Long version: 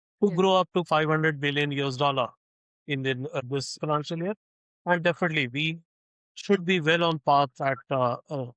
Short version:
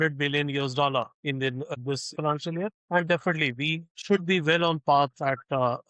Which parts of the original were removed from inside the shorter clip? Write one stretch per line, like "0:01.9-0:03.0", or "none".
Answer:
0:02.9-0:03.3
0:04.4-0:04.7
0:05.8-0:06.3